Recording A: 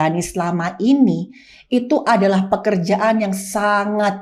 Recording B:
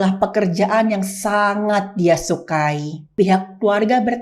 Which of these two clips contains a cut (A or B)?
B